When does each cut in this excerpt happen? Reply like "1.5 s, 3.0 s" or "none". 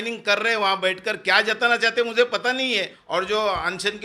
3.0 s